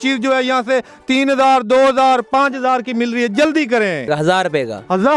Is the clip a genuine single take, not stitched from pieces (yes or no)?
no